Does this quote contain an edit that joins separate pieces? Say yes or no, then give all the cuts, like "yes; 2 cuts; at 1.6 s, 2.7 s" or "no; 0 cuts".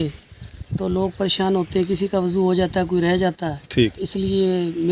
yes; 1 cut; at 4.0 s